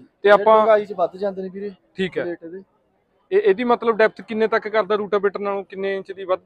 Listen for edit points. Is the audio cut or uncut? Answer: uncut